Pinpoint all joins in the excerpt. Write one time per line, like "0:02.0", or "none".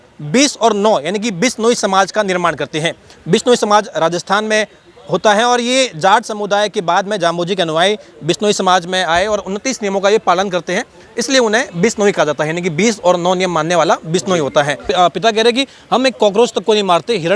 0:14.9